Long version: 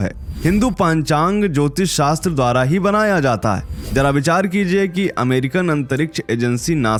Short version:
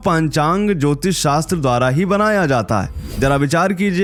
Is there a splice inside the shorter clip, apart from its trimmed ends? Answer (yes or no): no